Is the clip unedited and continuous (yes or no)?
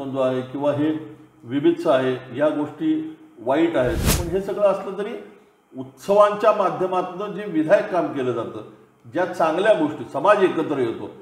yes